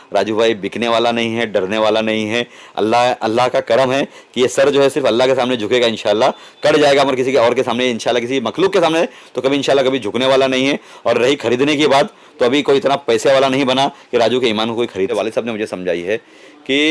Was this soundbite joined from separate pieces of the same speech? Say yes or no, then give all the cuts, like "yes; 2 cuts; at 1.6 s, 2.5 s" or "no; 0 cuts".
yes; 1 cut; at 15.1 s